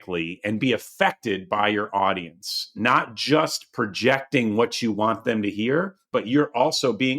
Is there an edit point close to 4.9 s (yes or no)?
no